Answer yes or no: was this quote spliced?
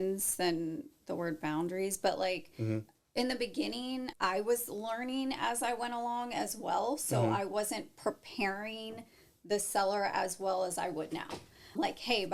yes